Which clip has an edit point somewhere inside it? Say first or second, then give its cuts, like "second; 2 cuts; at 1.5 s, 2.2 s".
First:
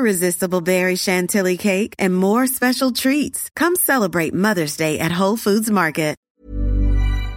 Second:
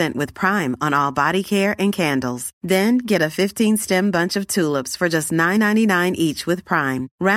first; 1 cut; at 6.2 s